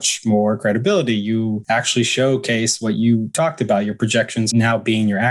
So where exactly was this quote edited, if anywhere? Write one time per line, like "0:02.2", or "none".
0:01.6
0:03.3
0:04.5